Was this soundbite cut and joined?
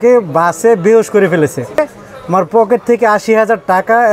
yes; 1 cut; at 1.8 s

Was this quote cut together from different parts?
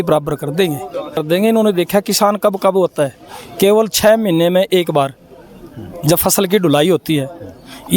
yes; 1 cut; at 1.2 s

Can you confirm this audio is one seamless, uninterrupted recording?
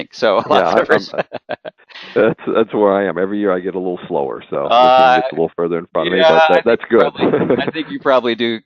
no; 1 cut; at 2.3 s

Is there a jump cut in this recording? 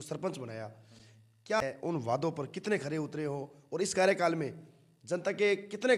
yes; 1 cut; at 1.6 s

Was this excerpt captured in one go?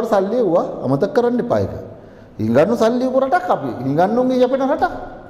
yes; 0 cuts

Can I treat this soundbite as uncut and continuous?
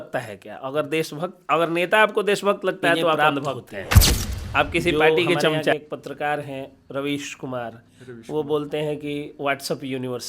no; 1 cut; at 5.7 s

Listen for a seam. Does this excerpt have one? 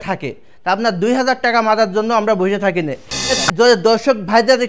yes; 1 cut; at 3.3 s

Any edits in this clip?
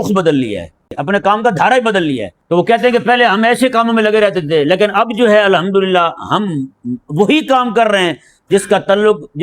yes; 2 cuts; at 1.0 s, 2.3 s

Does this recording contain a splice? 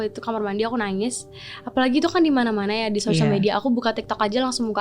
no; 0 cuts

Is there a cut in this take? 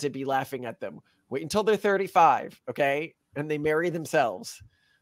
no; 0 cuts

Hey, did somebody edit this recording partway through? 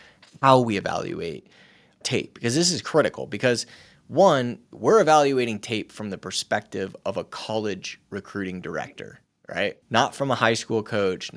yes; 3 cuts; at 2.0 s, 4.6 s, 9.8 s

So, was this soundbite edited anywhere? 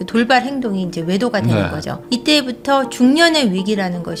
no; 0 cuts

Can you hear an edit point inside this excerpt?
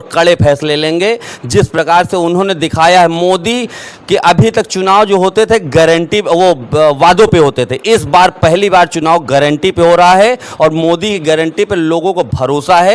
no; 0 cuts

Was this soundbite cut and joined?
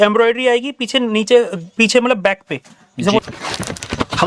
yes; 1 cut; at 3.2 s

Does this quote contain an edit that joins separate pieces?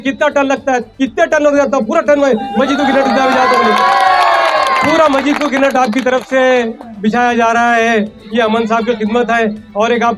no; 0 cuts

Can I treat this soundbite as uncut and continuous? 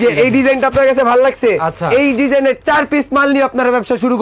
yes; 0 cuts

